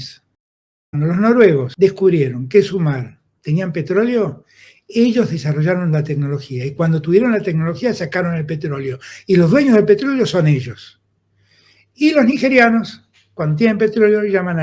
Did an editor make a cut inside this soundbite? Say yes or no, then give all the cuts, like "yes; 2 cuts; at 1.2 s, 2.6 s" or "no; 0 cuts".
yes; 2 cuts; at 0.9 s, 1.7 s